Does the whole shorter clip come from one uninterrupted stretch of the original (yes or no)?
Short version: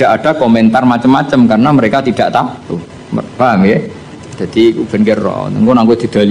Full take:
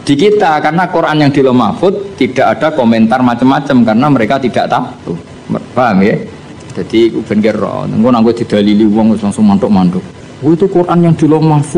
yes